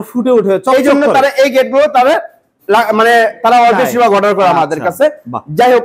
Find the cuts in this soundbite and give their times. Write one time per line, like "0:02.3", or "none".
none